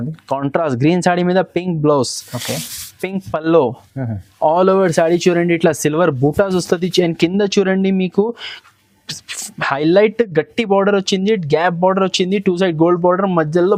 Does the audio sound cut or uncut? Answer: uncut